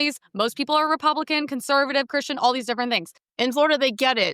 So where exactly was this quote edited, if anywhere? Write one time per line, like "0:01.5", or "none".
0:03.2